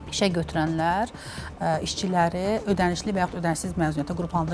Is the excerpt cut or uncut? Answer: uncut